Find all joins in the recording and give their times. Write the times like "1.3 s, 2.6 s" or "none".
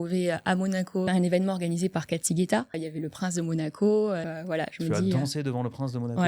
1.0 s, 2.9 s, 4.3 s